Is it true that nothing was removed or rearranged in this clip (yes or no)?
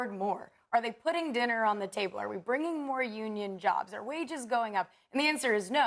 yes